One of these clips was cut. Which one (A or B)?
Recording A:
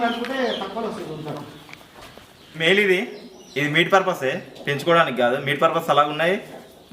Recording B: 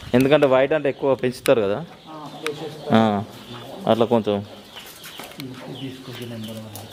A